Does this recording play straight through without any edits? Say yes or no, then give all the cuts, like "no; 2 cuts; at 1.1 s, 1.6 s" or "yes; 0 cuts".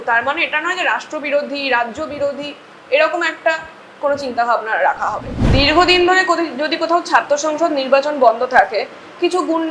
no; 1 cut; at 5.4 s